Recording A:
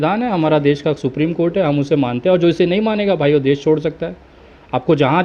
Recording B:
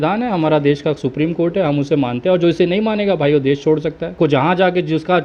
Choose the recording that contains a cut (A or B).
B